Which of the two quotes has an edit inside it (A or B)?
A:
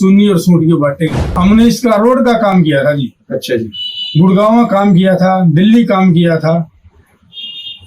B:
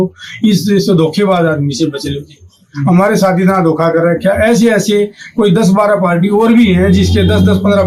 A